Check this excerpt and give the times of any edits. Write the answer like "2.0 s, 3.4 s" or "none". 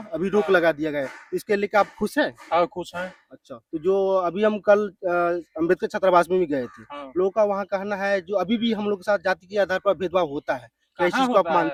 none